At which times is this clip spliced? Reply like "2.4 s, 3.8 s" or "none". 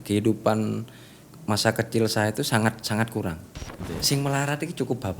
3.7 s

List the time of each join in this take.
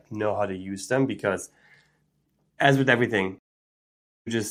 none

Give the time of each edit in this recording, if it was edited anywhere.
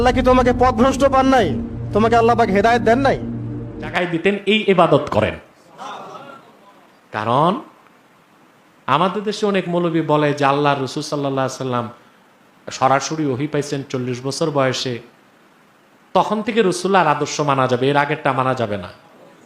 3.9 s

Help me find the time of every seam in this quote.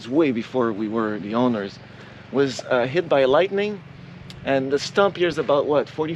none

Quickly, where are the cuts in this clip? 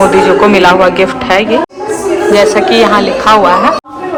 none

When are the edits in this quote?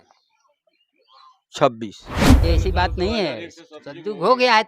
2.4 s

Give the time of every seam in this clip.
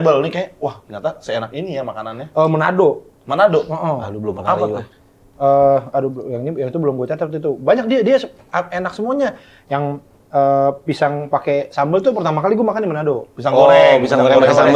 none

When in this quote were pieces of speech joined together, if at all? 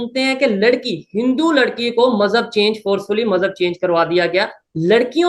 none

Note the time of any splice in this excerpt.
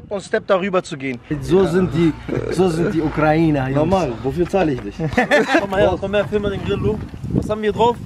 1.4 s, 5.6 s

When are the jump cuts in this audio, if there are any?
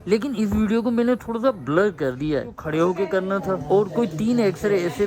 2.6 s

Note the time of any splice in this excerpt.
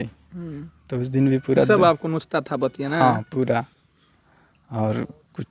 none

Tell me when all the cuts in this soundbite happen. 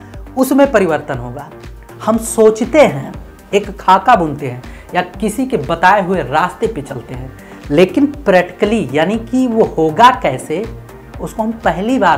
1.8 s

